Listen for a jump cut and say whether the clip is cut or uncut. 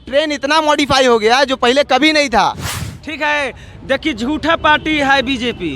cut